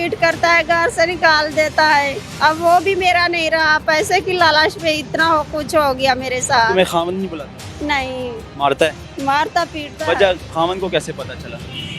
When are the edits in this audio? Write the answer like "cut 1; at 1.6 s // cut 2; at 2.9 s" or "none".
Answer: none

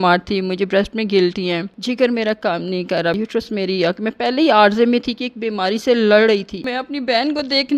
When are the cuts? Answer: cut 1; at 1.7 s // cut 2; at 3.2 s // cut 3; at 6.6 s

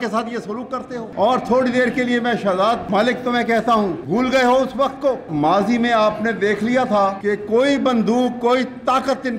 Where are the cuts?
cut 1; at 1.1 s // cut 2; at 2.8 s // cut 3; at 4.0 s // cut 4; at 5.3 s // cut 5; at 7.2 s

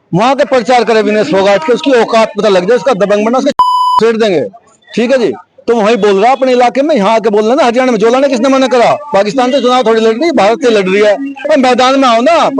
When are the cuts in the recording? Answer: cut 1; at 11.4 s

